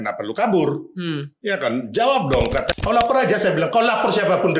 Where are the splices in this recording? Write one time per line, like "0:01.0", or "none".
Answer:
0:02.7